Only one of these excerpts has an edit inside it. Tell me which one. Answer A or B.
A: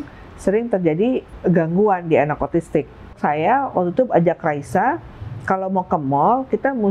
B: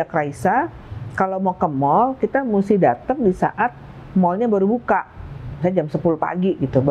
A